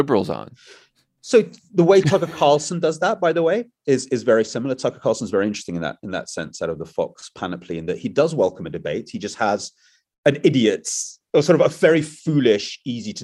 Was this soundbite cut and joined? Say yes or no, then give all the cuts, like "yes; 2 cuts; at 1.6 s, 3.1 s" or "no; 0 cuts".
no; 0 cuts